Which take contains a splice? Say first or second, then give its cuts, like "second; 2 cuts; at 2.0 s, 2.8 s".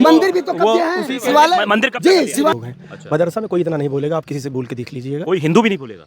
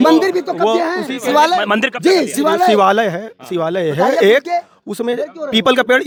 first; 1 cut; at 2.5 s